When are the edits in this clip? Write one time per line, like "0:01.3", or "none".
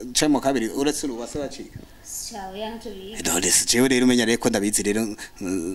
none

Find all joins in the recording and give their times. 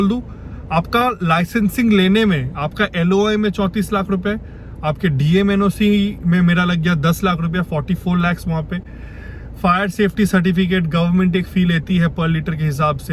none

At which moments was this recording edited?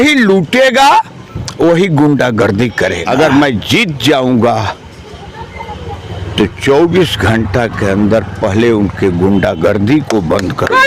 0:03.0

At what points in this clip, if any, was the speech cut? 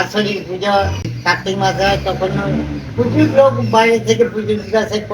0:01.1

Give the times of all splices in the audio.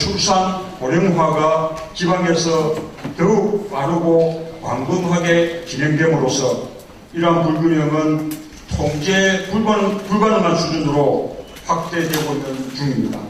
none

